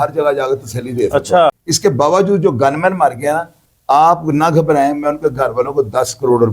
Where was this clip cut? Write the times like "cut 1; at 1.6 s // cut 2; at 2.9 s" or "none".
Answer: cut 1; at 1.6 s